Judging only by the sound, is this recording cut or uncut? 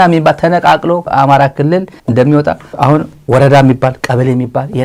uncut